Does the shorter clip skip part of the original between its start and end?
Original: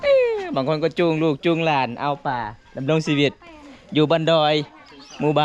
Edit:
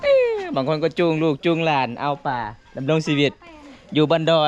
no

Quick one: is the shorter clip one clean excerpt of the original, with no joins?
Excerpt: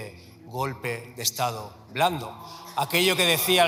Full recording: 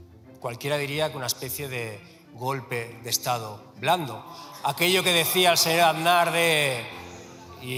yes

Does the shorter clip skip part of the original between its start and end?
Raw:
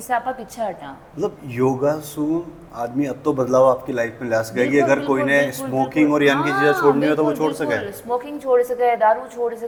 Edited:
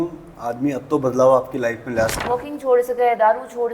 yes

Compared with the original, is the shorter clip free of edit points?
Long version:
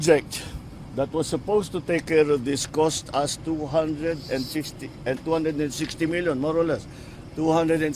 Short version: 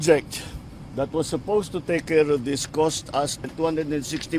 no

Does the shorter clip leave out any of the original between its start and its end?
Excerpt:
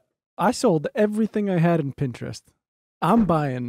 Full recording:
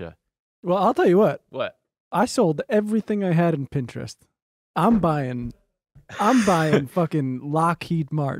no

